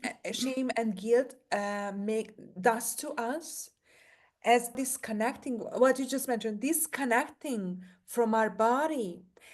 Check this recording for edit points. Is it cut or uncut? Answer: cut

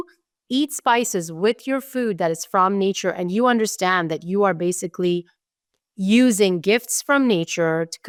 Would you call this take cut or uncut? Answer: uncut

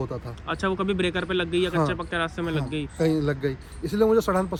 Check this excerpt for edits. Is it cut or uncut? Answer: uncut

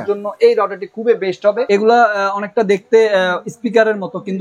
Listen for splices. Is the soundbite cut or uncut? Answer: cut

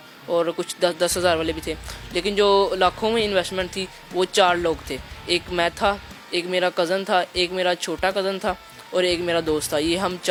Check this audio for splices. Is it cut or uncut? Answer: uncut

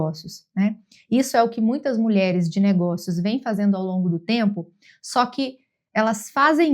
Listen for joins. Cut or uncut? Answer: uncut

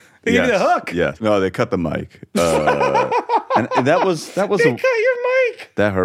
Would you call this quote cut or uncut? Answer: cut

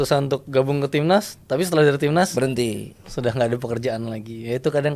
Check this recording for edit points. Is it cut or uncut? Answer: uncut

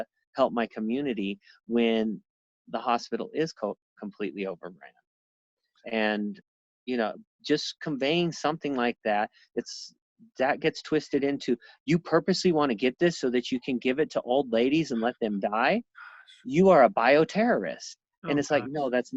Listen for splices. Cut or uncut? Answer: uncut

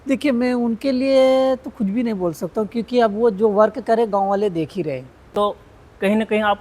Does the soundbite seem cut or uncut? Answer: cut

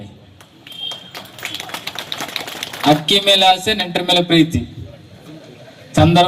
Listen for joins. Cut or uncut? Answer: cut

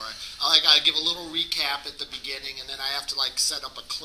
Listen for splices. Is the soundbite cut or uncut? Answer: uncut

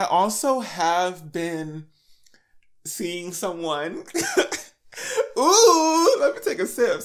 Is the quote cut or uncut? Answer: uncut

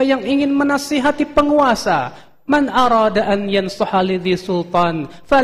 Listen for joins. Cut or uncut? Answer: uncut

